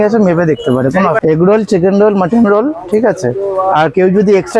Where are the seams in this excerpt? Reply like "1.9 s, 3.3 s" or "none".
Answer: 1.2 s